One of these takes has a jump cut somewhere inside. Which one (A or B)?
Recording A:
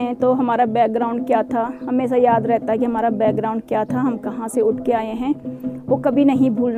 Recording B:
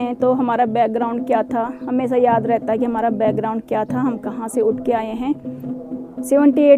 B